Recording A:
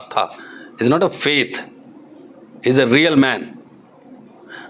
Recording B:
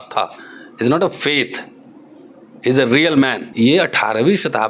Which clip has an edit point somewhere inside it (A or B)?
B